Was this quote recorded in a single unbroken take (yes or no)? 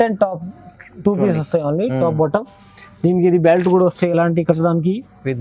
yes